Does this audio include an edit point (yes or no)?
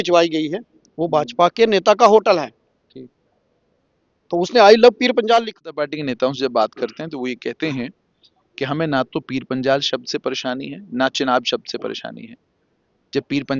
yes